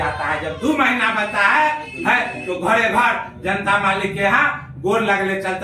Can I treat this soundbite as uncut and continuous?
yes; 0 cuts

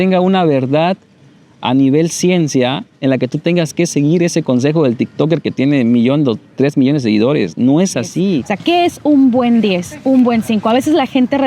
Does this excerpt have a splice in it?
yes; 1 cut; at 8.5 s

